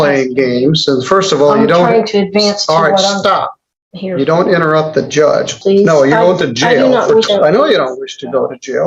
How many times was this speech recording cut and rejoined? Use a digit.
2